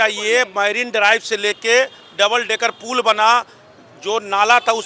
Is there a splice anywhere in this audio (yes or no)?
no